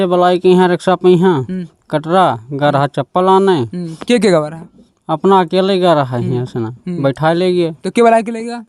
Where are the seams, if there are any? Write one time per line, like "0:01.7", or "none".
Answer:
none